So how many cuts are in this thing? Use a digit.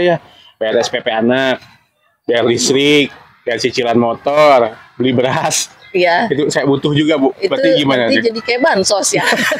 0